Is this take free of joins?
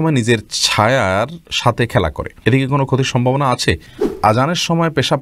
no; 2 cuts; at 2.3 s, 4.0 s

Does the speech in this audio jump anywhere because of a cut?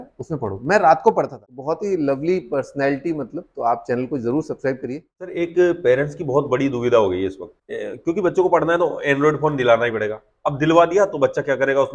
yes; 2 cuts; at 1.4 s, 5.3 s

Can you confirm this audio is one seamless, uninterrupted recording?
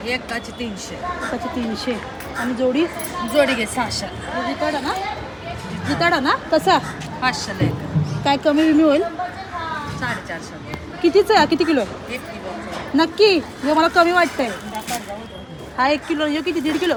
yes; 0 cuts

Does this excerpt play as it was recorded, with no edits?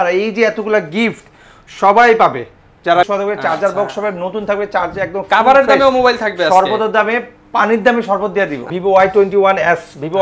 no; 2 cuts; at 3.1 s, 8.7 s

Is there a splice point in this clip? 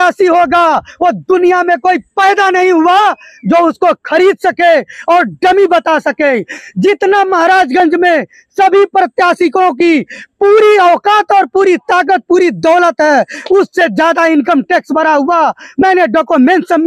no; 0 cuts

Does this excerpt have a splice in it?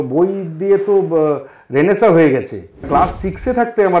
yes; 1 cut; at 2.9 s

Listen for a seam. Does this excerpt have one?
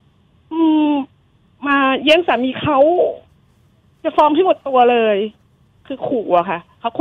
no; 0 cuts

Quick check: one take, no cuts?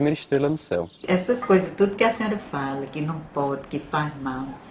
no; 1 cut; at 1.0 s

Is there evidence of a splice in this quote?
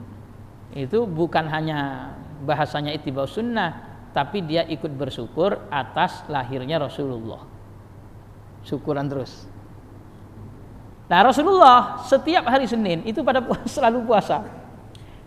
yes; 1 cut; at 10.9 s

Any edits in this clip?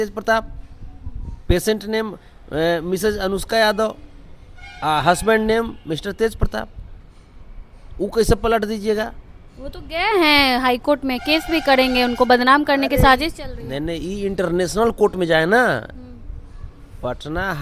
no; 0 cuts

